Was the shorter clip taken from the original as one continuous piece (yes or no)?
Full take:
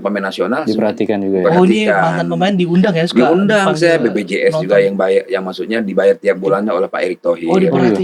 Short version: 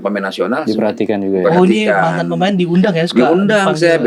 yes